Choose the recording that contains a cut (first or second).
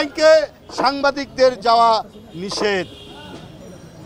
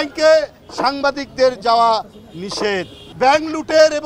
second